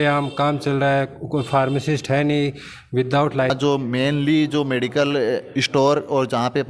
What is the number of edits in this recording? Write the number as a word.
one